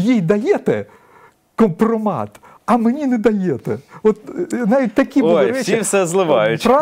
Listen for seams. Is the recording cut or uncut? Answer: uncut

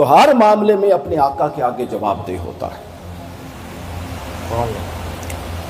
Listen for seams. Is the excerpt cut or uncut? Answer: uncut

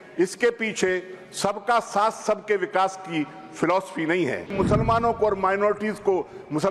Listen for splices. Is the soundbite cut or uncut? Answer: cut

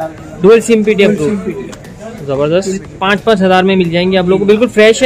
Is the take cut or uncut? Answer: cut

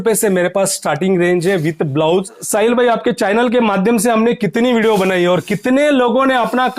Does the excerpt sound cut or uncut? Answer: cut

